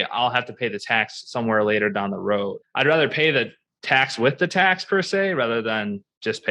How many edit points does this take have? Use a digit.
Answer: 0